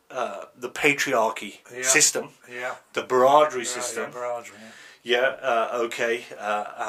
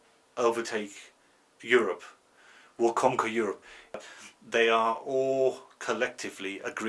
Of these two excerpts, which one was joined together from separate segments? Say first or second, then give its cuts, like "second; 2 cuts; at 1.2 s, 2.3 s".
second; 1 cut; at 4.1 s